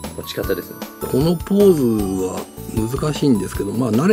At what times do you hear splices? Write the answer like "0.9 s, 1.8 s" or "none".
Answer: none